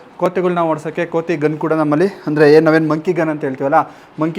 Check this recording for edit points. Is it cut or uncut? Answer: uncut